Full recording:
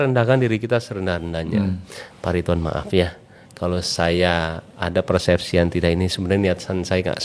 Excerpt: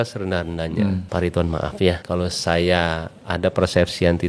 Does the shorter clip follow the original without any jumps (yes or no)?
no